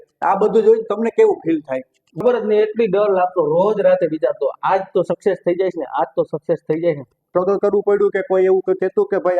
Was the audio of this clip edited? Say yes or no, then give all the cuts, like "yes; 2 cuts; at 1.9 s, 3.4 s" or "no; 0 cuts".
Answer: yes; 2 cuts; at 2.2 s, 7.3 s